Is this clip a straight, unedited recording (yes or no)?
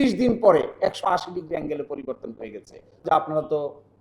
no